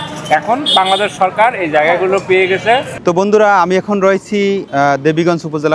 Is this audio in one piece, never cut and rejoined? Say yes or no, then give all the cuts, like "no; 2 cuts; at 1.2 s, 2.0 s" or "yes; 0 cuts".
no; 2 cuts; at 2.9 s, 4.7 s